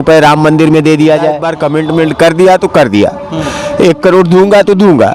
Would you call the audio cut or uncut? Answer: cut